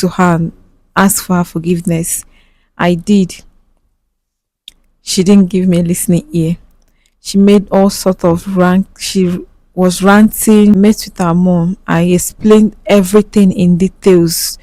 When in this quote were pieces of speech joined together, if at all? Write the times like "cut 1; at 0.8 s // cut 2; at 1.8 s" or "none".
cut 1; at 10.8 s